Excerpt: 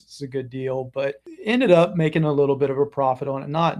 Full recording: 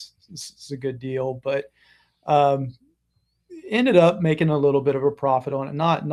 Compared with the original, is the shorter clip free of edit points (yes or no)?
no